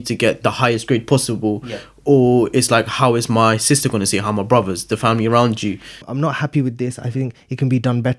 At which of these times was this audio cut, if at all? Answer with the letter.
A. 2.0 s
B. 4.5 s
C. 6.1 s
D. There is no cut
C